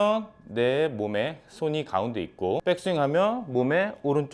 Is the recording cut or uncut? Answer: cut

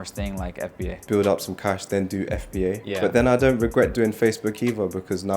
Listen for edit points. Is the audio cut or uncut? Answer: cut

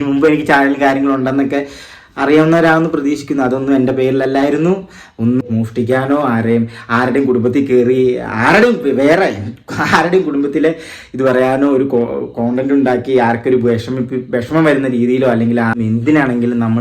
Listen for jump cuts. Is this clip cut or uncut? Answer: cut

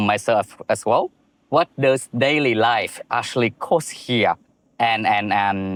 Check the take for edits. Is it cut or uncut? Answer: uncut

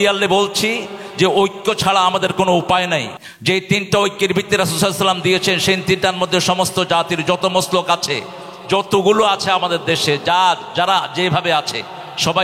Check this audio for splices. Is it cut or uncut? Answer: uncut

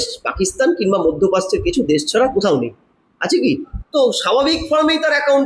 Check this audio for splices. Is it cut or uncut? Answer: cut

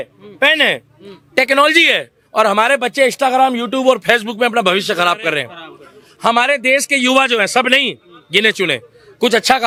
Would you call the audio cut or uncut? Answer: uncut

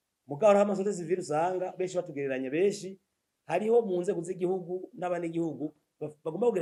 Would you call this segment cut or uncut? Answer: uncut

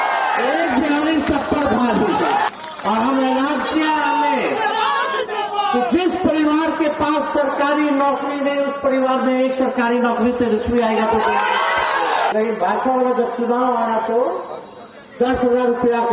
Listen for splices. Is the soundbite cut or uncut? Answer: cut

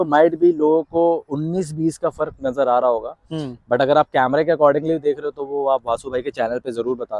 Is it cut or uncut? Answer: uncut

